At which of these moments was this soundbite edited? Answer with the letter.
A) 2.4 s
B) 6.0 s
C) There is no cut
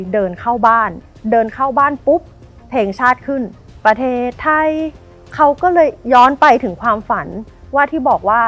C